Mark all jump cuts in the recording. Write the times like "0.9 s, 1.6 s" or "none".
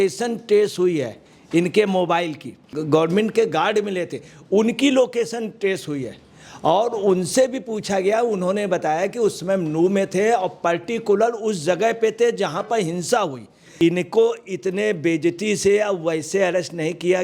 2.7 s, 13.7 s